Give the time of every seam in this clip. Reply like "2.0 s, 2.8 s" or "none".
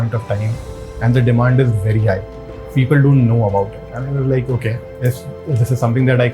none